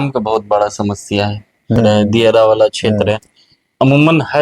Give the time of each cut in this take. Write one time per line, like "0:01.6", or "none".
0:01.8

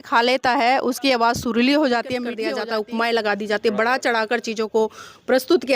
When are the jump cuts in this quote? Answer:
0:02.5

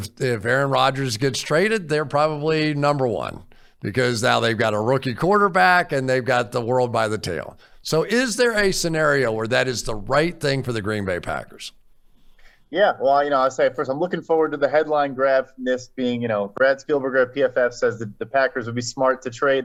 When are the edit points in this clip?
none

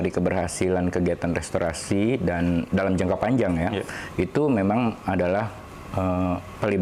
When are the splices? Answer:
none

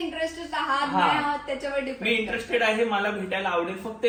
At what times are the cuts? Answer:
none

